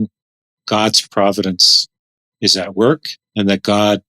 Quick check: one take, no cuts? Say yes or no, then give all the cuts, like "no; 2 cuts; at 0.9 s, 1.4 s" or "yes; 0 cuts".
no; 1 cut; at 3.2 s